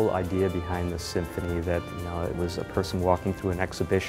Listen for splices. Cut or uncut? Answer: uncut